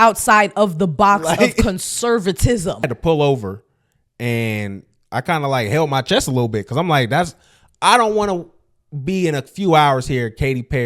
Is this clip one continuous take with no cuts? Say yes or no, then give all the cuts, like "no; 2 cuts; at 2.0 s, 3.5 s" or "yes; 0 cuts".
no; 1 cut; at 2.9 s